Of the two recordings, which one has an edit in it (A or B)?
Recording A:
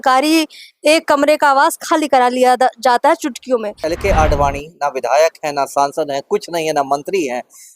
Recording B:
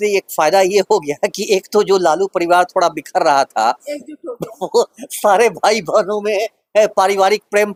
A